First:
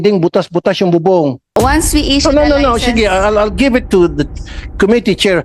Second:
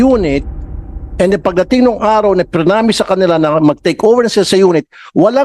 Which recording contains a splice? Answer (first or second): first